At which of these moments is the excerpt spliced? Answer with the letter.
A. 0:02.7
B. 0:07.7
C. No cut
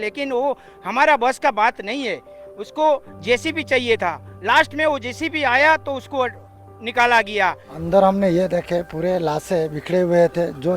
B